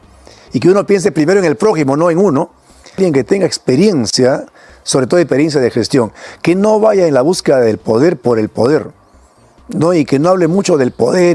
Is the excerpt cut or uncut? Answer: cut